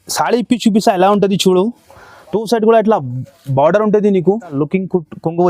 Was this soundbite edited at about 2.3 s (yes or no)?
no